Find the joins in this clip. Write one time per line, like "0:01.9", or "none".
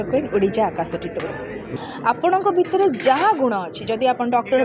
0:01.7